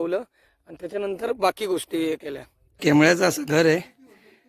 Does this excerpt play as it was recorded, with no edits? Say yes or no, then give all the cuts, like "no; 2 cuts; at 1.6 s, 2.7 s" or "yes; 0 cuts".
no; 1 cut; at 2.7 s